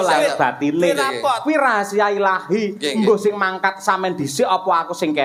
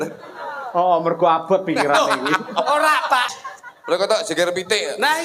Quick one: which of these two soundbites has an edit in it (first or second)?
second